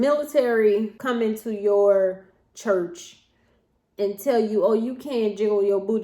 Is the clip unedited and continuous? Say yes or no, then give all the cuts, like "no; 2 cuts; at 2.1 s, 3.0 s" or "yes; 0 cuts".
no; 1 cut; at 1.0 s